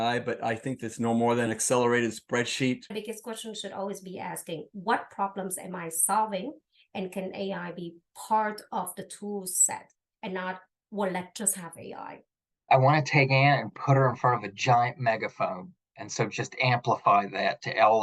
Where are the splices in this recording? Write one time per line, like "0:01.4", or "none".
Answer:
0:01.5
0:02.9
0:12.7

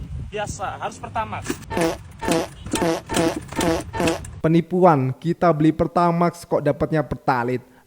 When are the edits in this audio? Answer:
0:01.6
0:04.3

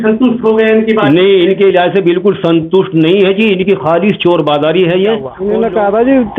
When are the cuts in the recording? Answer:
0:05.3

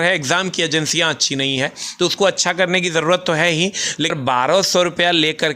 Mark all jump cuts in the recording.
0:04.1

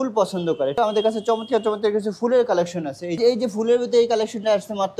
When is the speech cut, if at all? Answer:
0:00.8
0:03.2

